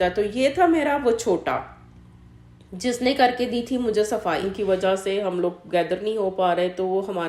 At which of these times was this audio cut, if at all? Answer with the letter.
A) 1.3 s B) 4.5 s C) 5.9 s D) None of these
B